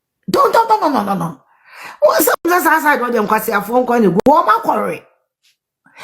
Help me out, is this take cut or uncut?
cut